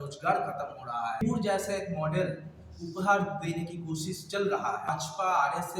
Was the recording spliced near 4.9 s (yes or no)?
yes